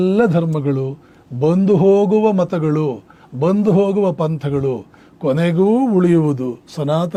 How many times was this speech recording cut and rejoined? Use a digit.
0